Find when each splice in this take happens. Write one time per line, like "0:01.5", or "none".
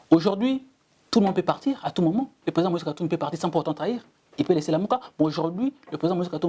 none